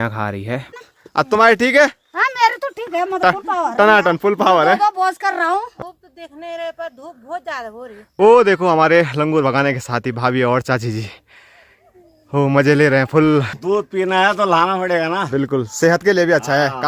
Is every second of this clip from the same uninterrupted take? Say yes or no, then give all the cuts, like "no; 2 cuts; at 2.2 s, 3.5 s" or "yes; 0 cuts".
no; 4 cuts; at 0.8 s, 5.7 s, 8.0 s, 13.6 s